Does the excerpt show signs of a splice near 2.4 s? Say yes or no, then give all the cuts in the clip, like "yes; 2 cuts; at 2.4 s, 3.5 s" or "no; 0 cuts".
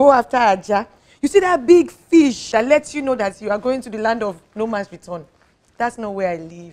yes; 1 cut; at 2.4 s